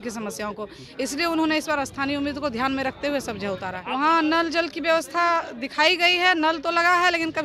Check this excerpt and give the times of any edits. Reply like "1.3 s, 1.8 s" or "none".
3.7 s